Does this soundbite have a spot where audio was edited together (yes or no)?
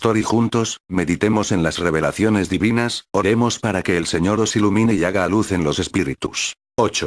no